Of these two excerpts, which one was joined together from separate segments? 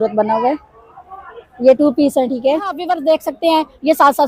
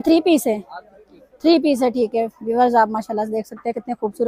first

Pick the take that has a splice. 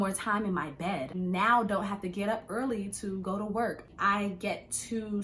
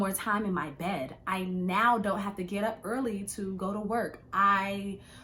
first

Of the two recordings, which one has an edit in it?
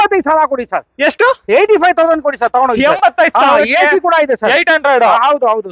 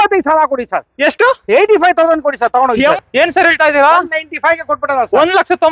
second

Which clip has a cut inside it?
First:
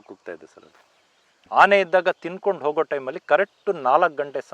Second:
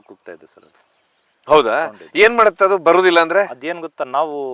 first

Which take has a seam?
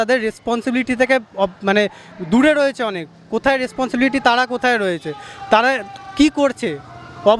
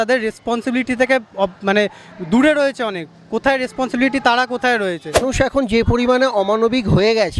second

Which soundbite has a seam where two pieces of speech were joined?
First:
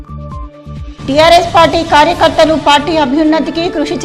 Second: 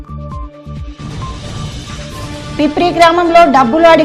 first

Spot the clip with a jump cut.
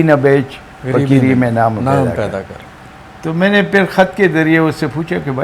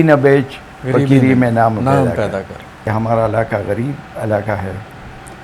second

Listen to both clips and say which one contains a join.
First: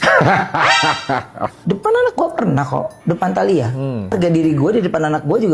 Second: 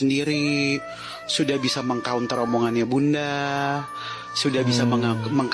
first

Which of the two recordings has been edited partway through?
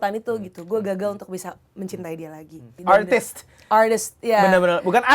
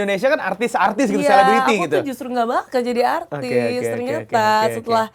first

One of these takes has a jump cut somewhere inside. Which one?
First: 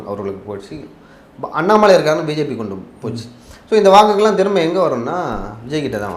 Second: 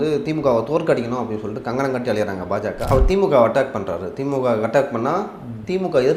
second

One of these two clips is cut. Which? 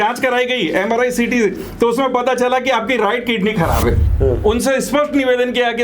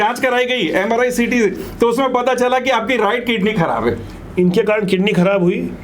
first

